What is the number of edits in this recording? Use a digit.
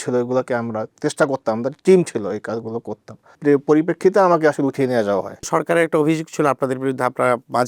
2